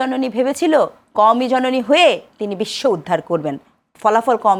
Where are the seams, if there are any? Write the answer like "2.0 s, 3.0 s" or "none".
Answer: none

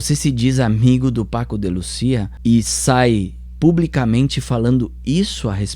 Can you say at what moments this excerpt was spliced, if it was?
2.3 s

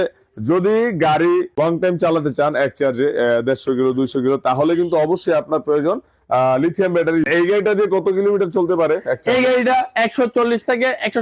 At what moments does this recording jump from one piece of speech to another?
1.6 s, 7.3 s

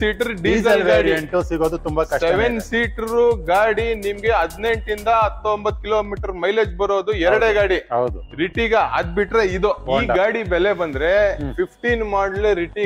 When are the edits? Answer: 9.9 s

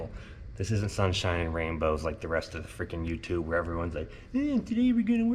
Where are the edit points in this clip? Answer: none

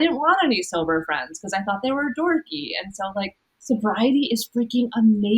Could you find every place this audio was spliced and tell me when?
3.5 s

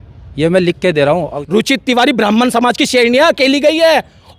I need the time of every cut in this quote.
1.3 s

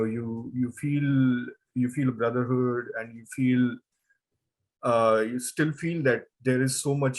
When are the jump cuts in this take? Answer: none

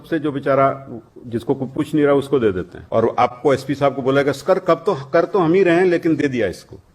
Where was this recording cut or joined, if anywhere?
2.7 s

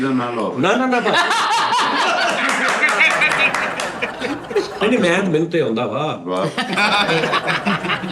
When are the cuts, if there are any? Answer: 4.8 s

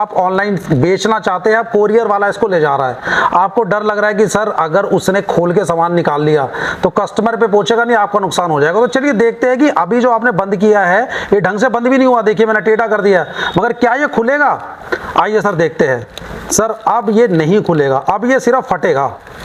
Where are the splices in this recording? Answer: none

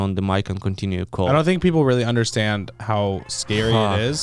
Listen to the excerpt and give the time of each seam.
none

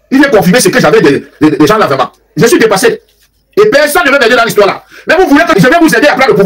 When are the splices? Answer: 2.2 s, 5.5 s

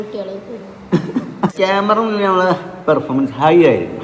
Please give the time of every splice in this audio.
1.5 s

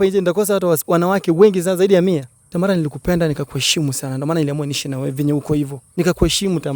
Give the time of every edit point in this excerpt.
2.4 s, 5.8 s

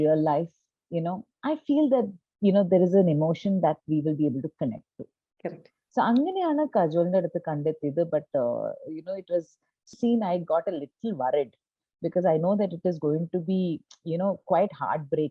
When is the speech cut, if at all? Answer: 10.0 s

